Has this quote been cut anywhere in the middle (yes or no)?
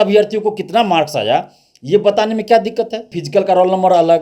yes